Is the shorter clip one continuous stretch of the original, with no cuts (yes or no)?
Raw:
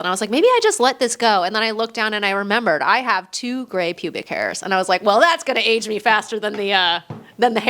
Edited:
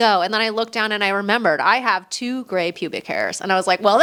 yes